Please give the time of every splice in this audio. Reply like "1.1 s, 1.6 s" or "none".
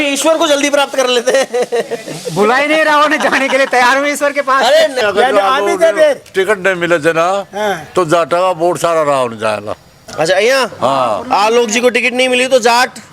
5.0 s

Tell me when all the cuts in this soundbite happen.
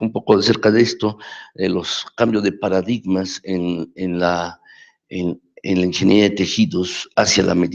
none

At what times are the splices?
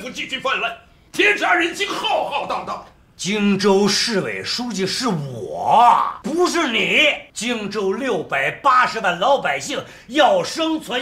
6.2 s, 7.3 s

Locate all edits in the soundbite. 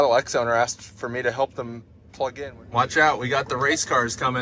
2.3 s

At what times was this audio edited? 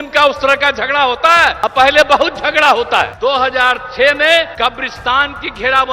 1.6 s, 3.1 s, 4.5 s

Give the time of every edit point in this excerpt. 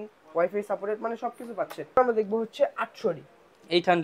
2.0 s

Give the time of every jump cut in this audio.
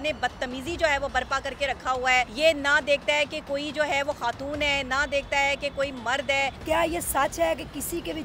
2.3 s, 6.6 s

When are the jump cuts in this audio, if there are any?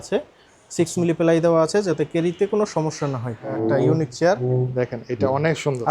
3.4 s

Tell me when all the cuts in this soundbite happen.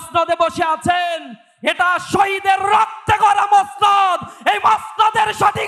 none

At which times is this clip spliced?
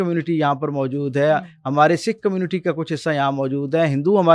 none

